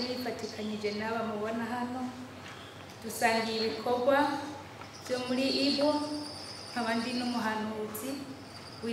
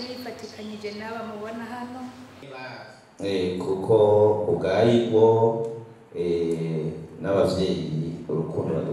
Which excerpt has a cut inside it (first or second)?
second